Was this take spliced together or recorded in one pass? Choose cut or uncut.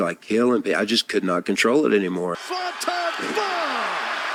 uncut